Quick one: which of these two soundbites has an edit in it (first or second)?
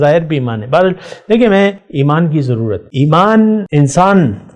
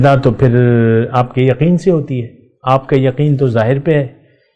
first